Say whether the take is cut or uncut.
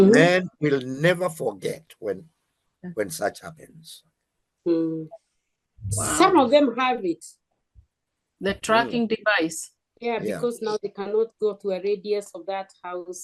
uncut